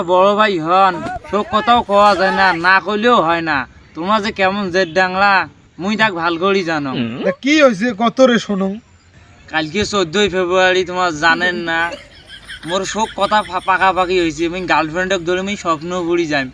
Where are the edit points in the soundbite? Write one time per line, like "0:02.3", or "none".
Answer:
none